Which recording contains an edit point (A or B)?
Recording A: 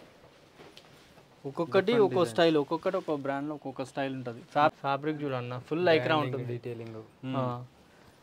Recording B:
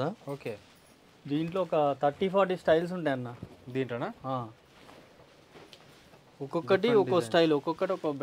A